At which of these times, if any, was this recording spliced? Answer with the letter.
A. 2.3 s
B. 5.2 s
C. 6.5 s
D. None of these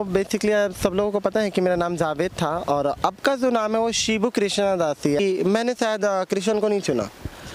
B